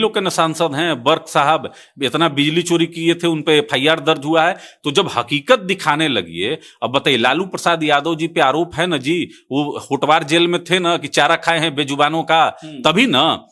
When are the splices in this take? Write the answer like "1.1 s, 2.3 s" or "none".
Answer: none